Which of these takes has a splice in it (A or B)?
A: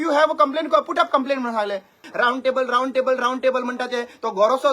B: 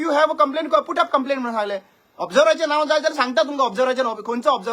A